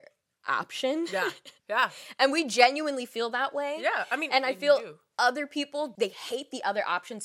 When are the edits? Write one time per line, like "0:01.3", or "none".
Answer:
0:05.9